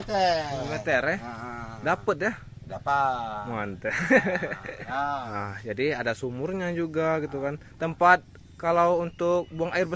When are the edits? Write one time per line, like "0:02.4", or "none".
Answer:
0:04.8

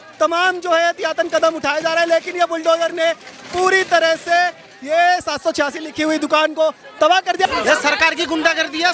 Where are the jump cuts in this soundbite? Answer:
0:07.5

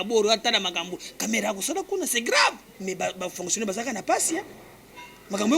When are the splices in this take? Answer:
0:02.7

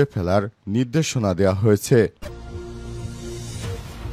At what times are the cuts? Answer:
0:02.2

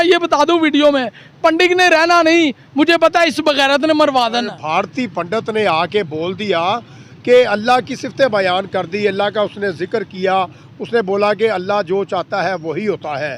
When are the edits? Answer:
0:04.6

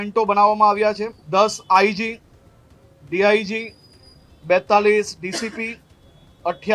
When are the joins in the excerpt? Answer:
0:01.1

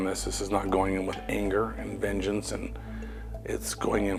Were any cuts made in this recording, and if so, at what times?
none

